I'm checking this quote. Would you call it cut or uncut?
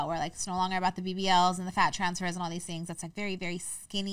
uncut